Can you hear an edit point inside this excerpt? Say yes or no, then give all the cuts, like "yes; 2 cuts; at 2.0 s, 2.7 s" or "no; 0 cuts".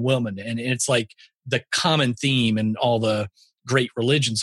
no; 0 cuts